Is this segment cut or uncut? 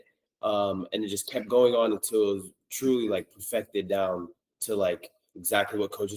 uncut